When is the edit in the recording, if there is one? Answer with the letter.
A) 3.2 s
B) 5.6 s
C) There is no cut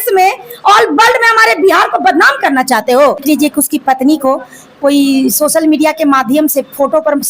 A